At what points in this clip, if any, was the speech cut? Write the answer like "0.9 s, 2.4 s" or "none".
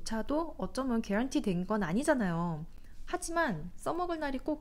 none